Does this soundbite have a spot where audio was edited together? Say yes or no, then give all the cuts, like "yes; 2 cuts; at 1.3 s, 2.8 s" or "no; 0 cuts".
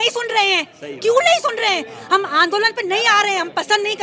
no; 0 cuts